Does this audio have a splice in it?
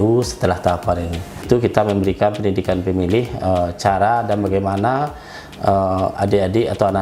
yes; 1 cut; at 1.4 s

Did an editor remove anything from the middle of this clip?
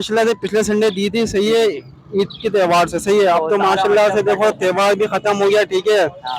no; 0 cuts

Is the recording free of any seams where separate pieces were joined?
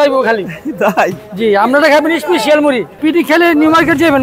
no; 1 cut; at 3.0 s

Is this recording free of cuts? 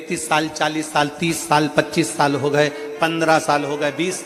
yes; 0 cuts

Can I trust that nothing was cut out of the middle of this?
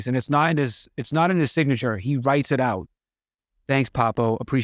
yes; 0 cuts

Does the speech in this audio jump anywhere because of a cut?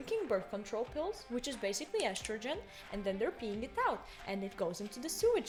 no; 0 cuts

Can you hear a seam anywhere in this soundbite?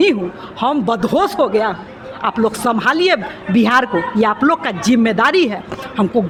no; 0 cuts

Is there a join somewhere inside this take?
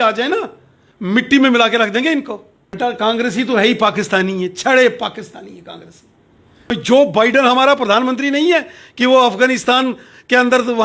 yes; 2 cuts; at 2.8 s, 6.7 s

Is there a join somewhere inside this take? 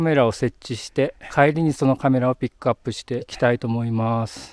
yes; 2 cuts; at 1.2 s, 3.3 s

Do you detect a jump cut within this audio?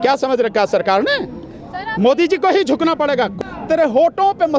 yes; 1 cut; at 3.3 s

